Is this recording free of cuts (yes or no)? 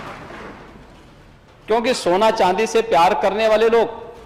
yes